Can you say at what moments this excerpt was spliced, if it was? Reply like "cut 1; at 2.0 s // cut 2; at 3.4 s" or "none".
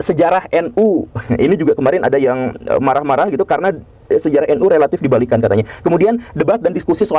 none